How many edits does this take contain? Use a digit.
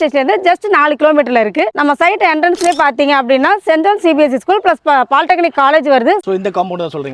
2